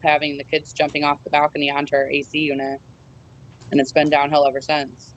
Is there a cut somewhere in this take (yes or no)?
no